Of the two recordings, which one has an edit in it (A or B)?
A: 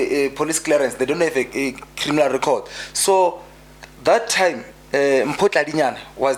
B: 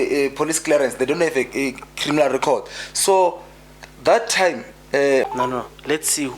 B